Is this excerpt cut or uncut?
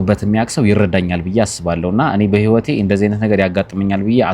uncut